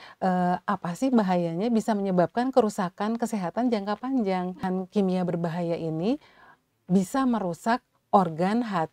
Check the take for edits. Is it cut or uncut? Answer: cut